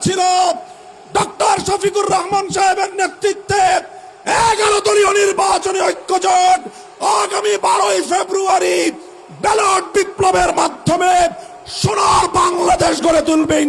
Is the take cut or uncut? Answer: uncut